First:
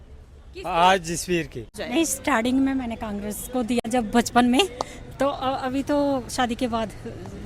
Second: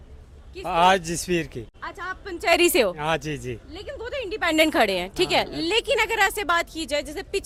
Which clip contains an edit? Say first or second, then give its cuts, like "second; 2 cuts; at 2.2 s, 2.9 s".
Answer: first; 2 cuts; at 1.8 s, 3.8 s